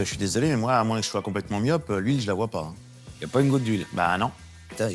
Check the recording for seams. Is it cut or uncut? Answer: uncut